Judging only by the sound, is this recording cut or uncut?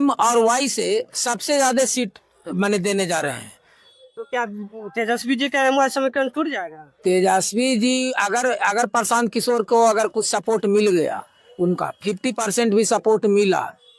uncut